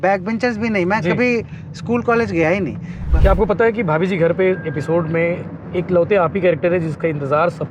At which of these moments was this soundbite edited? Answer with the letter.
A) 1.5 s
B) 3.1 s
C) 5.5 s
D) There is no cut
B